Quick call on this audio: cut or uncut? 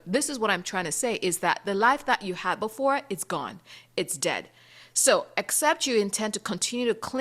uncut